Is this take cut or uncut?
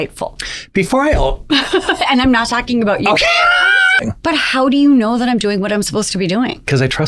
cut